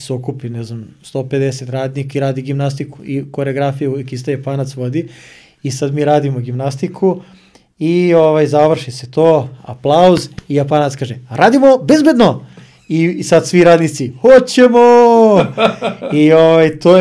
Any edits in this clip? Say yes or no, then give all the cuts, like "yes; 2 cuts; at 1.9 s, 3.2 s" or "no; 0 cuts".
no; 0 cuts